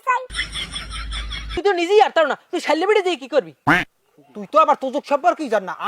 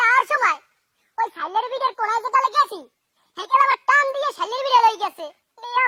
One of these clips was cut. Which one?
first; 1 cut; at 1.6 s

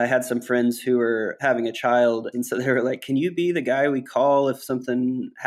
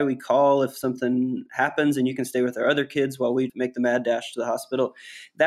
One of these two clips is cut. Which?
first; 2 cuts; at 1.3 s, 2.3 s

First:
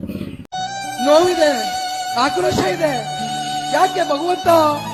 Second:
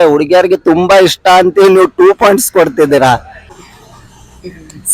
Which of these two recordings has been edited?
second; 1 cut; at 3.6 s

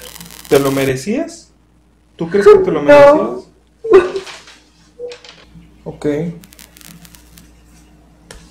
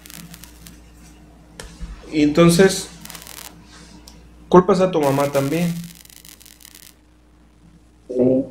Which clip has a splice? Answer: first; 1 cut; at 5.5 s

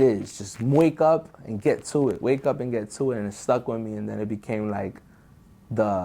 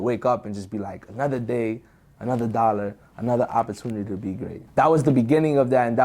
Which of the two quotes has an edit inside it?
second; 1 cut; at 4.5 s

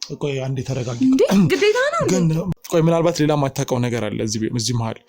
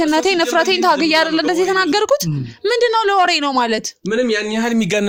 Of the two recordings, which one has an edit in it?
first; 1 cut; at 2.5 s

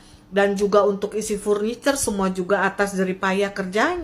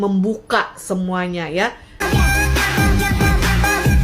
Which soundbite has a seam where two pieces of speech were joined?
second; 1 cut; at 2.0 s

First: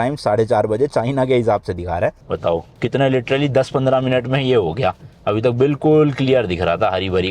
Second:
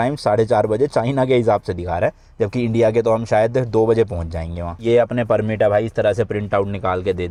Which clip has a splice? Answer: first; 1 cut; at 2.2 s

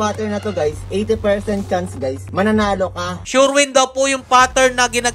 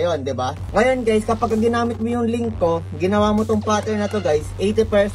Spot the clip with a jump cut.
first; 1 cut; at 3.2 s

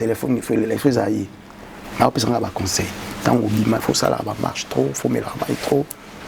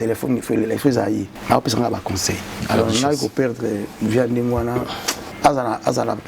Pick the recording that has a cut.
second; 3 cuts; at 1.3 s, 2.6 s, 5.2 s

